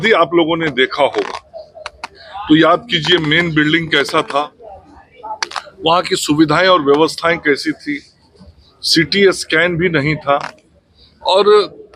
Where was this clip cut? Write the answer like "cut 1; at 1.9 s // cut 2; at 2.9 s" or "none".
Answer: none